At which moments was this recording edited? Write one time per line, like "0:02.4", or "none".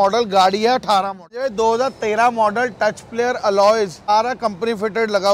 0:01.4
0:04.1

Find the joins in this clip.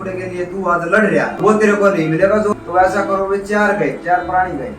0:01.4
0:02.5

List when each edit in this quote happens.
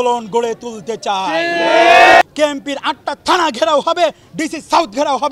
0:02.2

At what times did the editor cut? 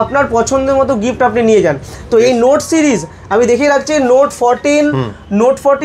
none

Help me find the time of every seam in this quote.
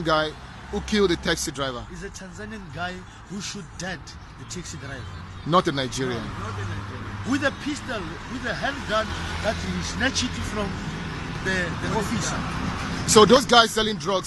none

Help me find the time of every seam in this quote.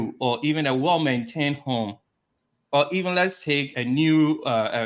none

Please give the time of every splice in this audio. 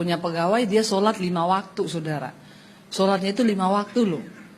none

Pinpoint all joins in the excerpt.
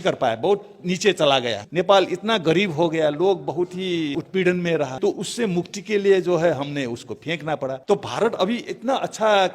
0:01.6
0:04.1
0:04.9
0:07.8

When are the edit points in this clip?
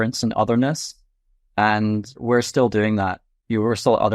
0:02.2

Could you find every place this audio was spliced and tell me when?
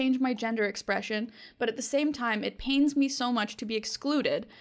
none

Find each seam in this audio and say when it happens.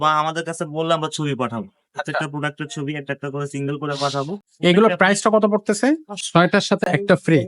0:04.4
0:06.1

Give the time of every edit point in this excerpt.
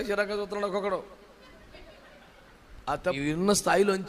0:03.1

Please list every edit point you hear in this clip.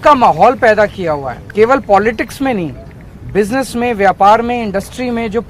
0:01.4

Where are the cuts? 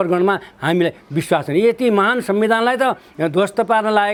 none

